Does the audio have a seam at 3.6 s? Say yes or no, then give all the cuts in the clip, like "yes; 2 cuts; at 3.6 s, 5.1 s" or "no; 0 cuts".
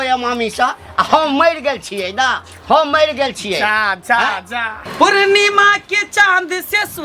no; 1 cut; at 4.9 s